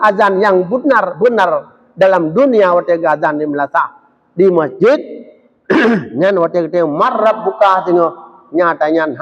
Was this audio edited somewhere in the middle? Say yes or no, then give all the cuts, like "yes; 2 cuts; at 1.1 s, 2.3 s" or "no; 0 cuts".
no; 0 cuts